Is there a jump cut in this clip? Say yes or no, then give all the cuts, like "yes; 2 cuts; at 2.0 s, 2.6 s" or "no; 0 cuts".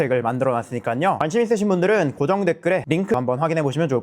yes; 2 cuts; at 1.2 s, 3.1 s